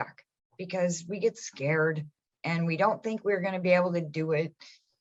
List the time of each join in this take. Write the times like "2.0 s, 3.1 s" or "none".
none